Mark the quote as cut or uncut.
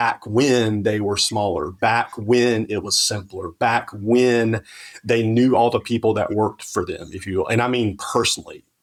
uncut